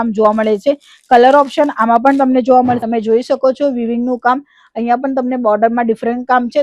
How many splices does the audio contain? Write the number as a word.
one